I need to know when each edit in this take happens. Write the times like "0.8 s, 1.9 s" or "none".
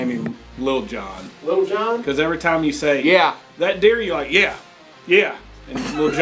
none